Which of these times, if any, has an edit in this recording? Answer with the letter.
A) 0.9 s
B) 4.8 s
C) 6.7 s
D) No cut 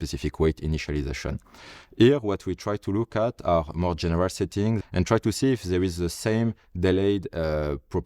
B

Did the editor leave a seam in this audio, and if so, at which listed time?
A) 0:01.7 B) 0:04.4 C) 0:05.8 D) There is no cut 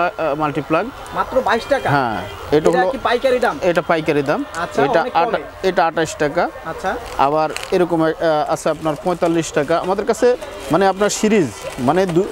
D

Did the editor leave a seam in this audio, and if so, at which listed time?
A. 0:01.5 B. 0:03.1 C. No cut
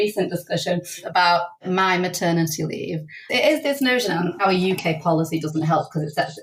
C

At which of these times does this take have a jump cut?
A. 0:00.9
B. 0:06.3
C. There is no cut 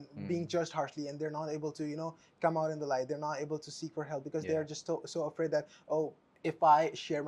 B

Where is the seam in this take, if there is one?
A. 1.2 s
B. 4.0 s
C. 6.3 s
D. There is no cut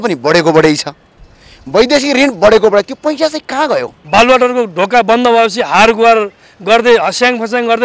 B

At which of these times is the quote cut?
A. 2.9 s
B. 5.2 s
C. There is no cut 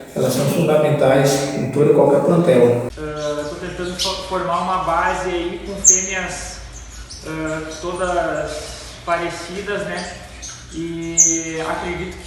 A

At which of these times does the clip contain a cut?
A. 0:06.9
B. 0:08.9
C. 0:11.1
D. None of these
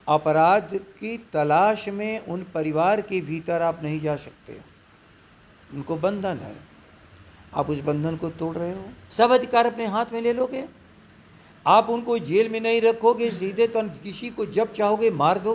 B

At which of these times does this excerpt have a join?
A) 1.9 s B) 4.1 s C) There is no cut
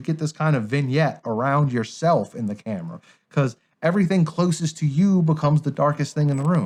C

